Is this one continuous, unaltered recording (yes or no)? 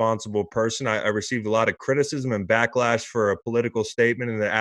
yes